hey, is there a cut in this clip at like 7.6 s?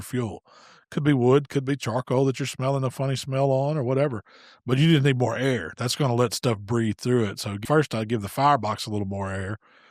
yes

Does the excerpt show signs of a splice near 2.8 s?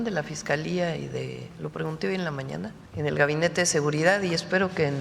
yes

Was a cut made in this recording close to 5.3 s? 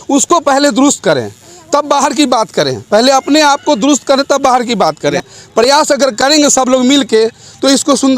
yes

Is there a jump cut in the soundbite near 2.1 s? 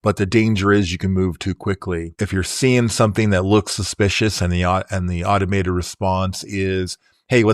yes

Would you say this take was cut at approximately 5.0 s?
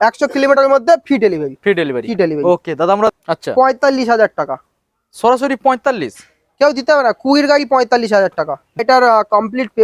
no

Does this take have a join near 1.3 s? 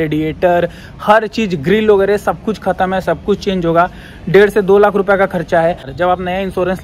no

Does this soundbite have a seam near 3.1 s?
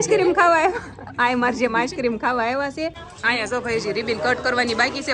yes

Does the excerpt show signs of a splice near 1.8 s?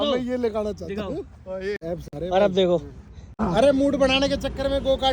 yes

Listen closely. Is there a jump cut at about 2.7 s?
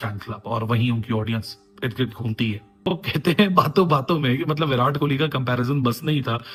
no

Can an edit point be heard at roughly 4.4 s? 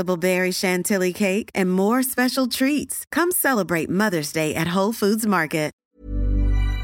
no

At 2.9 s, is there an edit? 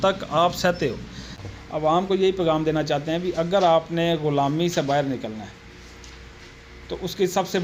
no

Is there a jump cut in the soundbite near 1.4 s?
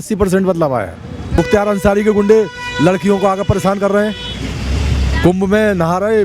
yes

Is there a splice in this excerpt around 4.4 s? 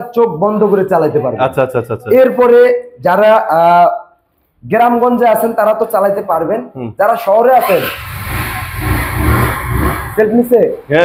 no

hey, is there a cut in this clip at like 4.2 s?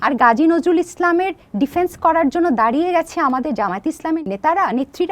yes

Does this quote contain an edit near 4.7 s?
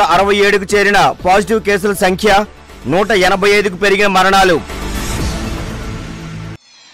yes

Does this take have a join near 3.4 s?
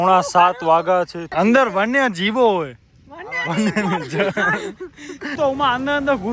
no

